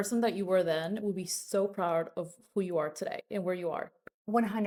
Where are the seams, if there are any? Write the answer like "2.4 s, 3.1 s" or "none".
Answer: none